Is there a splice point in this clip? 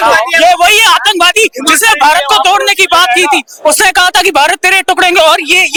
no; 0 cuts

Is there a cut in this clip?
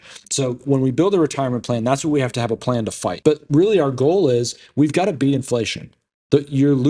yes; 1 cut; at 3.1 s

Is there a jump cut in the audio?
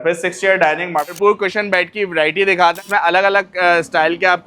yes; 2 cuts; at 1.0 s, 2.8 s

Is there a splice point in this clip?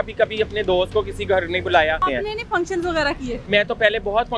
yes; 2 cuts; at 2.0 s, 3.4 s

